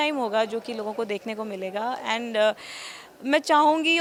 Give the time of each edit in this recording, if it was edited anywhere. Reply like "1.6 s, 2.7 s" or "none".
none